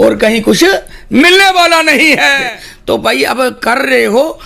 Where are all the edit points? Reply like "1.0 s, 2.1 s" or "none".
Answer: 2.4 s